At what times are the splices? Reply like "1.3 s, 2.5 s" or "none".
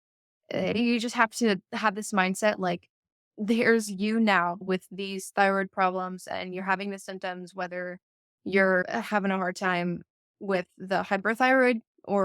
4.6 s, 8.9 s